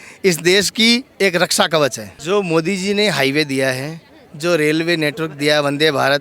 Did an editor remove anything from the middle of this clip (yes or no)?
yes